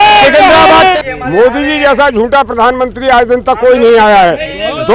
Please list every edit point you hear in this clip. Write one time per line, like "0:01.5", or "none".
0:01.0